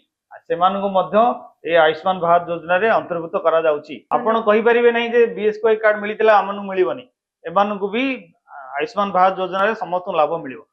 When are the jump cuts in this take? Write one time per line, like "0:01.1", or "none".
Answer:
0:03.9